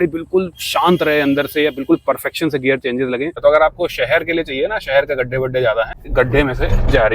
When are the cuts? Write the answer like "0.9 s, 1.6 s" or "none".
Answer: 3.3 s, 6.0 s